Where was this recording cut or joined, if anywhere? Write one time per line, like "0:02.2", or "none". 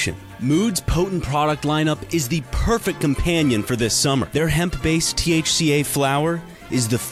none